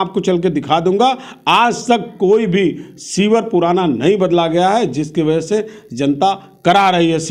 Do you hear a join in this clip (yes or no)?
no